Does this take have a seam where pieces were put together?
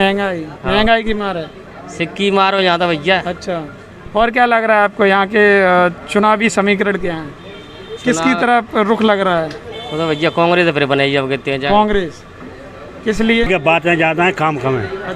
yes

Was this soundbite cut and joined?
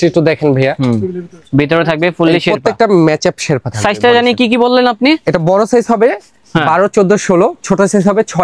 no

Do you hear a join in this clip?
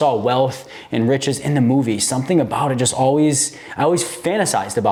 no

